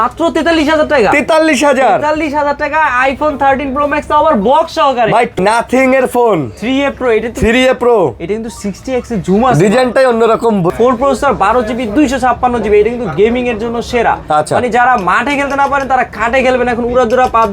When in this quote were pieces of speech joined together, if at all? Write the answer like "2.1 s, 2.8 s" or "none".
5.4 s, 10.7 s